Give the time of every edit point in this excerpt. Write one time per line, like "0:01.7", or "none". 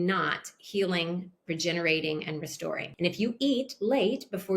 0:02.9